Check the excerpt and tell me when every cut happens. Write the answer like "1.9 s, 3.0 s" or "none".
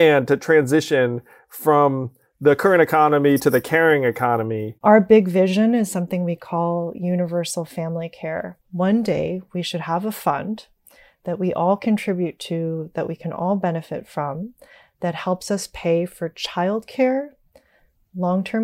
4.7 s, 8.5 s